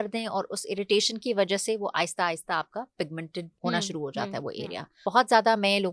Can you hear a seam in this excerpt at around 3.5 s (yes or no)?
yes